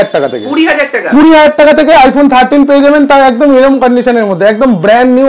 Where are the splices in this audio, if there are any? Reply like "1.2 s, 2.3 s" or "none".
none

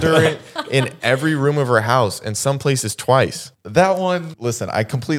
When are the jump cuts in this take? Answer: 3.6 s, 4.3 s

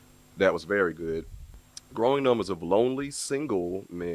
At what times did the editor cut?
1.2 s

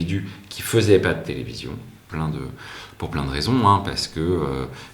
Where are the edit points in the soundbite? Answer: 2.0 s

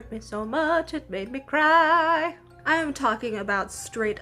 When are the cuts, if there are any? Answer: 2.5 s

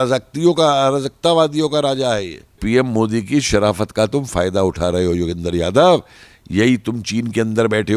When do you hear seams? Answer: 2.6 s

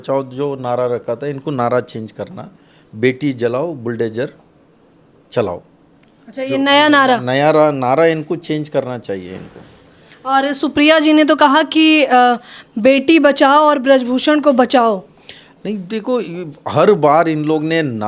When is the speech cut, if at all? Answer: none

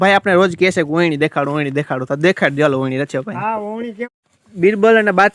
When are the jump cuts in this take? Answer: 4.1 s

